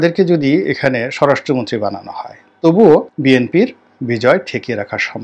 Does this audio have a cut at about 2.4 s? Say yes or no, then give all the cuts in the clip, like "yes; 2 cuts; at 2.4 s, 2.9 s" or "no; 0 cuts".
no; 0 cuts